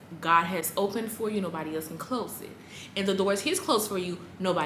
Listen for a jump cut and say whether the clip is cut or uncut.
uncut